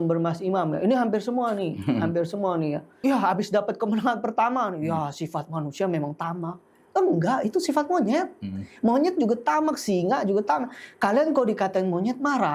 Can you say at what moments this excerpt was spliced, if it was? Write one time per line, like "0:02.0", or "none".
none